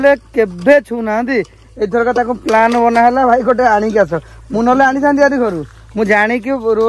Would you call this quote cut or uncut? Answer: uncut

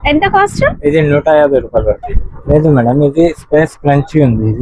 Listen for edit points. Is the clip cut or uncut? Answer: cut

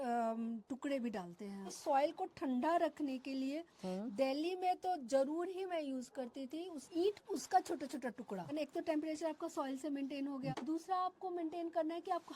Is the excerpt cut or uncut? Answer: cut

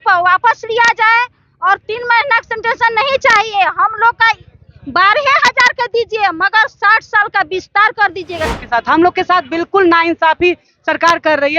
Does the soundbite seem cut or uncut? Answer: cut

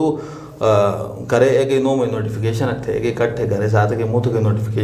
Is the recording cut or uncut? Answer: uncut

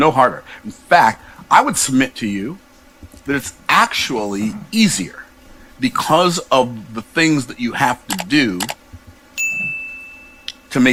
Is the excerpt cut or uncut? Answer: uncut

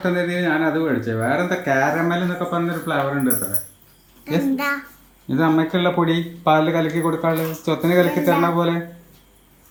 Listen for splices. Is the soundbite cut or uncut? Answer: uncut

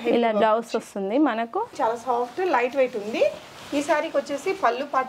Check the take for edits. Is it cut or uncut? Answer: cut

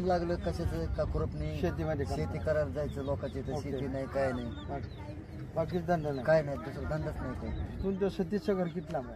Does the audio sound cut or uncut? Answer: uncut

